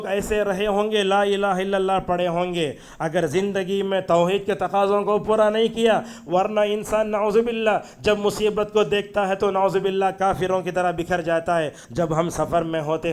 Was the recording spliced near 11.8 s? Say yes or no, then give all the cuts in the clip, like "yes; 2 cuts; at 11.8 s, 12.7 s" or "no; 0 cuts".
yes; 1 cut; at 11.8 s